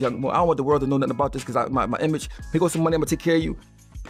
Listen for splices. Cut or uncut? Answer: uncut